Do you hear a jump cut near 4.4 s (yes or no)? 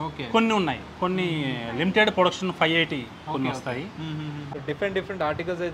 yes